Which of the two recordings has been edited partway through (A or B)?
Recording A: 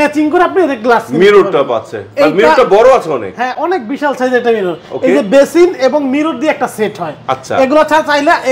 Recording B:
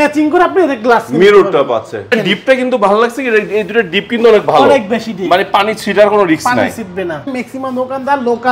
B